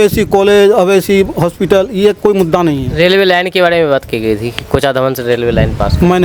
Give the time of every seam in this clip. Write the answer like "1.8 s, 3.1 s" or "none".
none